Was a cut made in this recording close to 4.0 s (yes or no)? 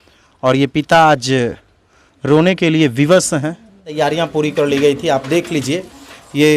yes